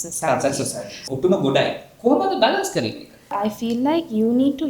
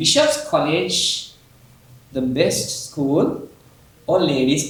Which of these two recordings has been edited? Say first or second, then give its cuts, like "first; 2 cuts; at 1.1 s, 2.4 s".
first; 2 cuts; at 1.0 s, 3.4 s